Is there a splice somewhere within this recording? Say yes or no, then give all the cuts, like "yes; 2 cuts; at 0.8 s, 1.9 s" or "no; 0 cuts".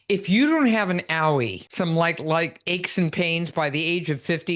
yes; 1 cut; at 1.6 s